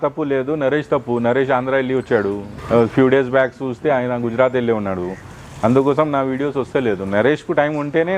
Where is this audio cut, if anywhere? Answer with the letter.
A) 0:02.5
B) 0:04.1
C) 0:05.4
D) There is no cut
A